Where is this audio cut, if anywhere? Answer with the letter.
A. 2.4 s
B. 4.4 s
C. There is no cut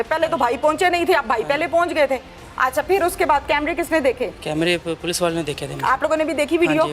C